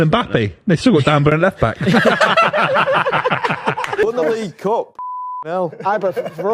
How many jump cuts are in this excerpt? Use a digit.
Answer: 1